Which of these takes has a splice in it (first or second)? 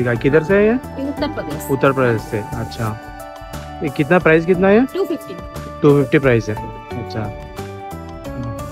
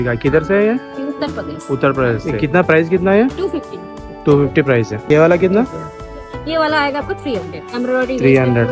second